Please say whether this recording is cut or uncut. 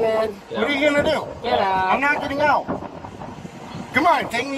uncut